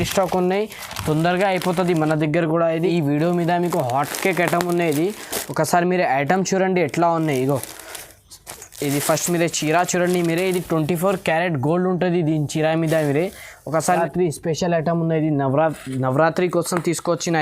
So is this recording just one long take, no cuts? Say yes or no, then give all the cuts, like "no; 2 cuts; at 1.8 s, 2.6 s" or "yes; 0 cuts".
no; 2 cuts; at 2.8 s, 13.8 s